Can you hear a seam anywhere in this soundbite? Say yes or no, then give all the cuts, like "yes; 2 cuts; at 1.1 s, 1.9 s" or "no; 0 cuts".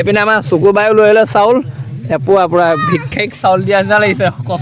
no; 0 cuts